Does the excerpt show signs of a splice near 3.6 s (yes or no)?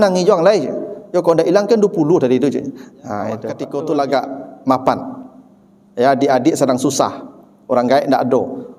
yes